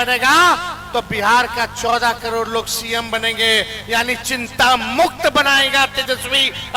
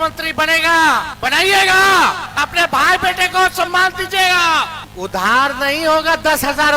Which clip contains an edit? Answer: second; 3 cuts; at 1.1 s, 2.3 s, 4.8 s

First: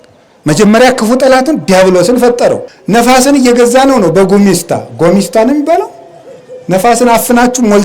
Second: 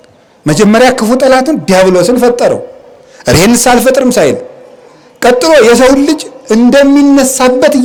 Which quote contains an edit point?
first; 1 cut; at 2.7 s

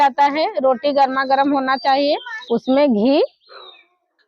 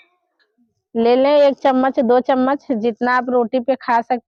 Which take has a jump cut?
first; 1 cut; at 2.3 s

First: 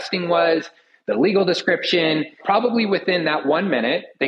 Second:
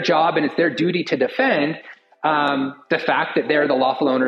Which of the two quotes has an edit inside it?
first; 1 cut; at 2.4 s

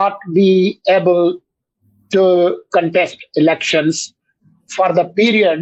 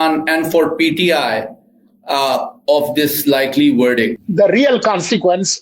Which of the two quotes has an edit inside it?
second; 1 cut; at 4.2 s

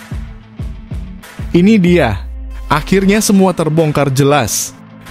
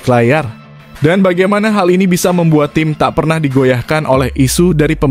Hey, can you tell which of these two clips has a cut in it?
first; 1 cut; at 1.5 s

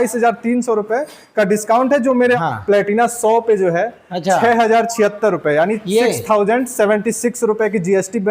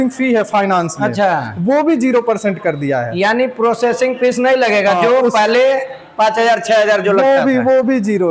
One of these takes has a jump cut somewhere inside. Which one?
first; 1 cut; at 2.4 s

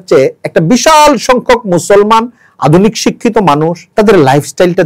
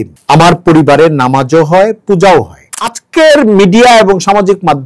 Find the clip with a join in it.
second; 1 cut; at 2.6 s

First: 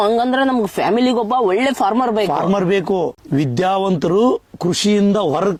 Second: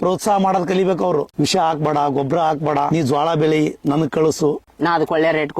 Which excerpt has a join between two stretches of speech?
second; 2 cuts; at 1.3 s, 2.9 s

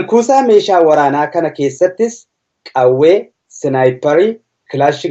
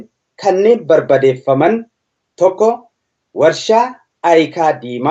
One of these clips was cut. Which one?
second; 1 cut; at 1.2 s

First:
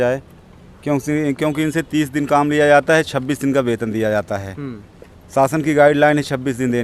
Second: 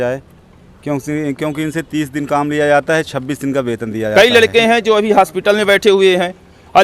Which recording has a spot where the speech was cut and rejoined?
second; 1 cut; at 4.1 s

